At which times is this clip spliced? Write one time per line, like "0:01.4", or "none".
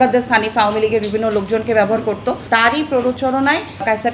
0:02.4

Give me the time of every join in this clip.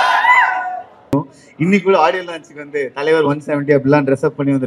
0:01.1

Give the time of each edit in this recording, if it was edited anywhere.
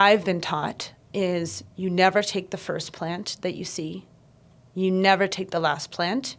none

